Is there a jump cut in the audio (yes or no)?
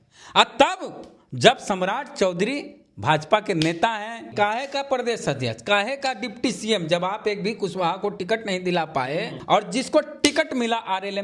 yes